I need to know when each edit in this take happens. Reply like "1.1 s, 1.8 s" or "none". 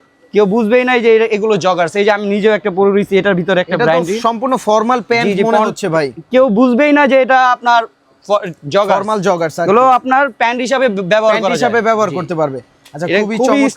none